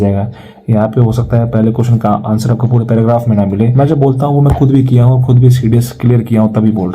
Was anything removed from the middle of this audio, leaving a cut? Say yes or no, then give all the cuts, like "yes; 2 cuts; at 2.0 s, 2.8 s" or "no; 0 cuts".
yes; 1 cut; at 3.7 s